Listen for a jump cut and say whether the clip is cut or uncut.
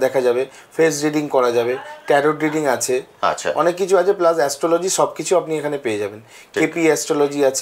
uncut